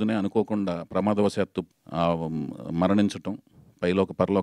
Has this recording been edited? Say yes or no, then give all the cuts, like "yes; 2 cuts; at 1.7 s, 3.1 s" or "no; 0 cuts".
yes; 1 cut; at 1.8 s